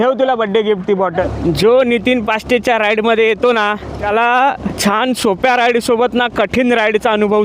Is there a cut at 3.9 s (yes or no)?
yes